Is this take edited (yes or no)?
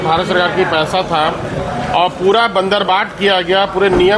no